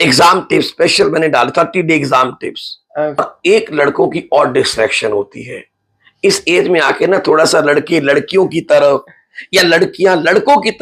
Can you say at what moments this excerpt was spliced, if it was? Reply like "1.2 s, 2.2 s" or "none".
3.2 s